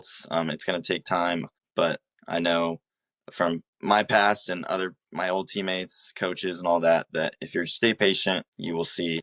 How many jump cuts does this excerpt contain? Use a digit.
0